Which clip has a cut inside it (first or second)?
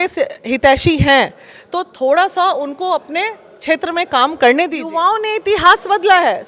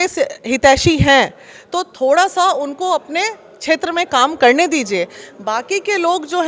first